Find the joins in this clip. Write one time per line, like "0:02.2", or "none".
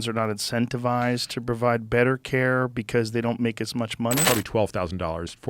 0:04.3